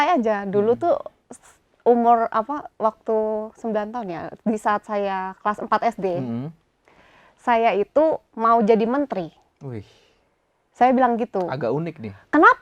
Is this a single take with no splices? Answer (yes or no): yes